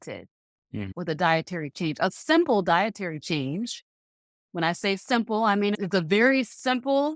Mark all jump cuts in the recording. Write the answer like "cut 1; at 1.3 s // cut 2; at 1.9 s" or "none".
cut 1; at 0.9 s // cut 2; at 5.8 s